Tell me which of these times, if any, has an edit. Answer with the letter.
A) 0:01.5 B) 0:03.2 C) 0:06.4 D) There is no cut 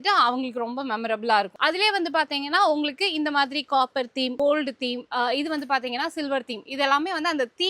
A